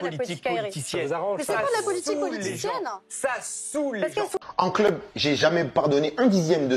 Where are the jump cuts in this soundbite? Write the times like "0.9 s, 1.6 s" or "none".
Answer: 4.4 s